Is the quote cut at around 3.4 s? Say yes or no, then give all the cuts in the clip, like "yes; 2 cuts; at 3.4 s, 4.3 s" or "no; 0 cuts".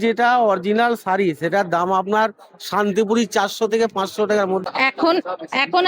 no; 1 cut; at 4.6 s